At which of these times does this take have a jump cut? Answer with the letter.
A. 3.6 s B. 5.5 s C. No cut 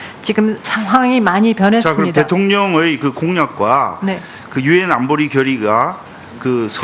A